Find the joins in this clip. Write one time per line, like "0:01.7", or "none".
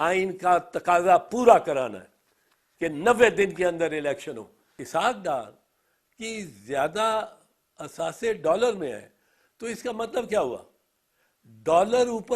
0:04.8